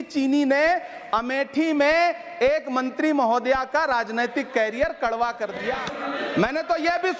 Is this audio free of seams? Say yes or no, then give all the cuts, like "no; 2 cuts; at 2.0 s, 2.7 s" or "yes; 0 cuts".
no; 1 cut; at 5.9 s